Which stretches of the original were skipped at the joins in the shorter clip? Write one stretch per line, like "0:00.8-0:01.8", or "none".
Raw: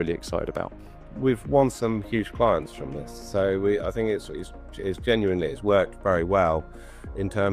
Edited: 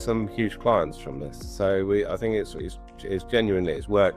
none